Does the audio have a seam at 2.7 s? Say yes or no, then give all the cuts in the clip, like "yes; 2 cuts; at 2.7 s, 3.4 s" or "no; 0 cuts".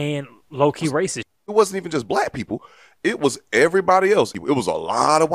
no; 2 cuts; at 1.4 s, 4.3 s